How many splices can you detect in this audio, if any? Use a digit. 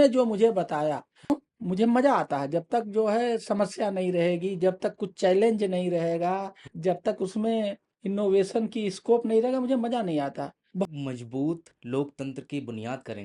2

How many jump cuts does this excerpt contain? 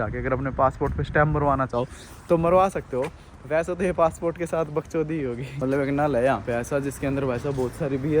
1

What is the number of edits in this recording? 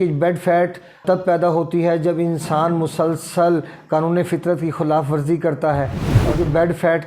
2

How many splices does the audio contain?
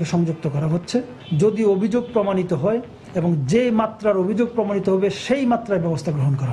1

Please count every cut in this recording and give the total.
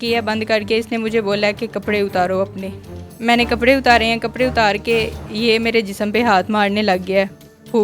1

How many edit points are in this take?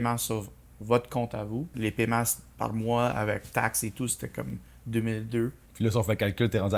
2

